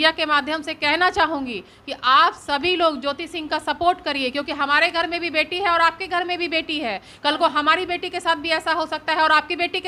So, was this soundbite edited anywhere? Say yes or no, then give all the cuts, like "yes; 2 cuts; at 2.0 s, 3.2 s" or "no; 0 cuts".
no; 0 cuts